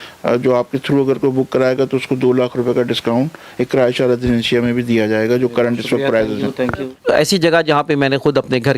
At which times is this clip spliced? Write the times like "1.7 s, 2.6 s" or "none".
6.9 s